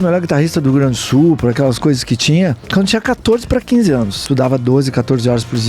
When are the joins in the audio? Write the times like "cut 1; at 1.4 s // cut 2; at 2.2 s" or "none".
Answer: cut 1; at 2.6 s // cut 2; at 4.2 s